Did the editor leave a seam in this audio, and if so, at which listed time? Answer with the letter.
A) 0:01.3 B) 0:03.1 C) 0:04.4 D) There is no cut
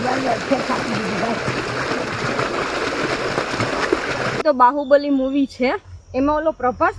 C